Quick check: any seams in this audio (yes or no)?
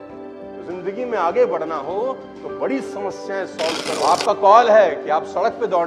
yes